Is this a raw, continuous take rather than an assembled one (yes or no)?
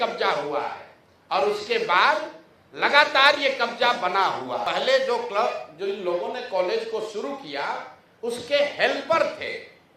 no